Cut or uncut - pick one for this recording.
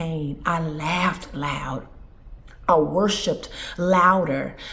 uncut